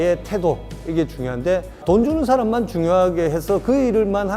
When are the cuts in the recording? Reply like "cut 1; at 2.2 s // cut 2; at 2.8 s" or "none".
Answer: cut 1; at 1.8 s